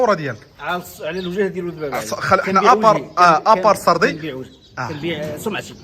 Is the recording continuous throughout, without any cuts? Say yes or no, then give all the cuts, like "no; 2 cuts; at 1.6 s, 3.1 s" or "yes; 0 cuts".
yes; 0 cuts